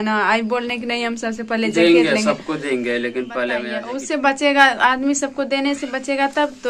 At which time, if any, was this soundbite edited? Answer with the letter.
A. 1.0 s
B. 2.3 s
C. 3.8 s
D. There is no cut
C